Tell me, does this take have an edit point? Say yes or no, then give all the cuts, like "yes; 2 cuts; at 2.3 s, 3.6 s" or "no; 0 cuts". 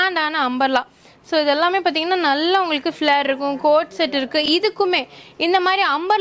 no; 0 cuts